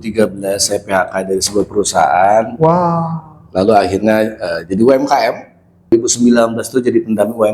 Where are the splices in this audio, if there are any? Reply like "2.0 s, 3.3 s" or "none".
5.9 s